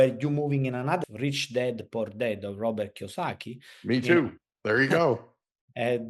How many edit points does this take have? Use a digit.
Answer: 1